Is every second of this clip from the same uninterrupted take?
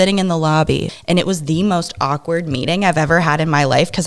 no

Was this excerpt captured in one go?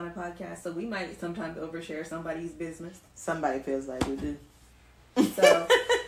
yes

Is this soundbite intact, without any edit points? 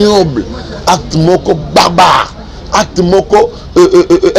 yes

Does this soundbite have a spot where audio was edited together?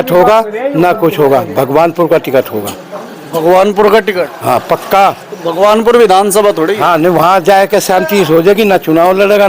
no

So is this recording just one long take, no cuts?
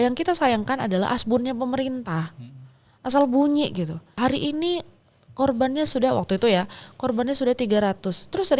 no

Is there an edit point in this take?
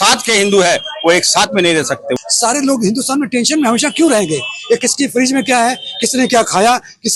yes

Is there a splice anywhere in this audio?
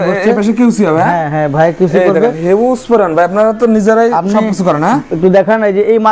no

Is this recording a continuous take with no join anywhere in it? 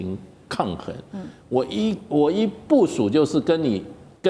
yes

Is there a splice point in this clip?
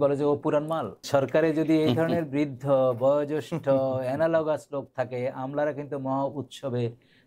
yes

